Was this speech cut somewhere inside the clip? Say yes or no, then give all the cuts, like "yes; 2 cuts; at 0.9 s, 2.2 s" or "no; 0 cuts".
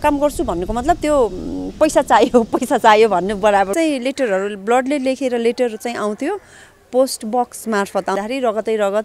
yes; 2 cuts; at 3.7 s, 8.1 s